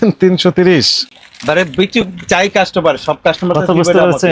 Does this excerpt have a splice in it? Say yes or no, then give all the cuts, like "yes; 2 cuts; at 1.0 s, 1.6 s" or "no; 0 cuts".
no; 0 cuts